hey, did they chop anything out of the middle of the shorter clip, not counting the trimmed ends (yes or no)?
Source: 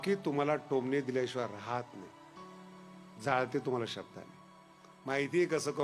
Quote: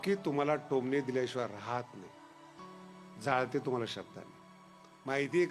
no